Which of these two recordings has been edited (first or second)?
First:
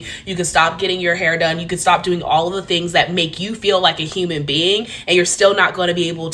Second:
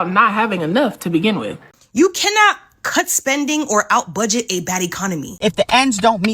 second